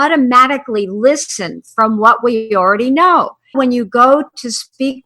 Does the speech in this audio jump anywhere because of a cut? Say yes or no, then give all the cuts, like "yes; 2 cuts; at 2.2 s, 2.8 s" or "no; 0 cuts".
yes; 1 cut; at 3.6 s